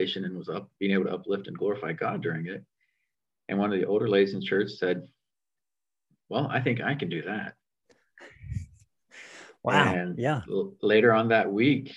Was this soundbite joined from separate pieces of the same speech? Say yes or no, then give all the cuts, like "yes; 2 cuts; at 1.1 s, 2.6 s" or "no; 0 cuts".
no; 0 cuts